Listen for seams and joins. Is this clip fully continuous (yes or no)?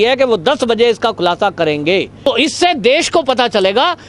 no